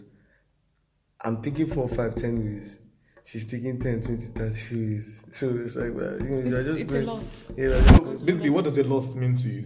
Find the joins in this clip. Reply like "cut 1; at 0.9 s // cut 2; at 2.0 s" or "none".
cut 1; at 8.0 s